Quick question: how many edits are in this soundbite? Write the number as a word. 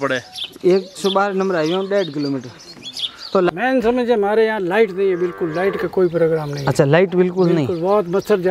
one